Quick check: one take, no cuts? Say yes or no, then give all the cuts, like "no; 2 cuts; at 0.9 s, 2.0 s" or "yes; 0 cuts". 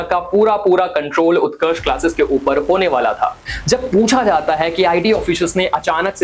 no; 1 cut; at 3.5 s